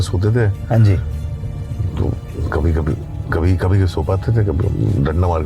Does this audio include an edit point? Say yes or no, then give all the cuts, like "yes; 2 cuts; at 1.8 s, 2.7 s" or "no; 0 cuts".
no; 0 cuts